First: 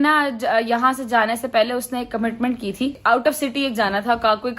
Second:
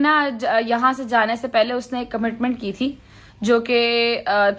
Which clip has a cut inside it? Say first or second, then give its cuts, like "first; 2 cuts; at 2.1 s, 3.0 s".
first; 1 cut; at 3.0 s